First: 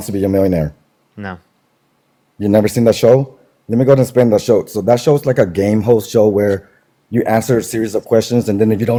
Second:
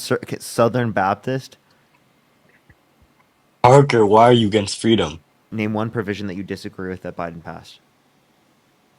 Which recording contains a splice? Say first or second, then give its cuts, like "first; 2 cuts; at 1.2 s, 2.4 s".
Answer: second; 1 cut; at 5.5 s